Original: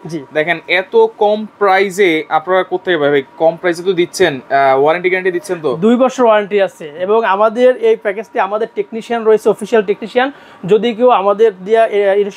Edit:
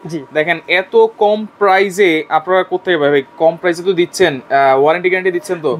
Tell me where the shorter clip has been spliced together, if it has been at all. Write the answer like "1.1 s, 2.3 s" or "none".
none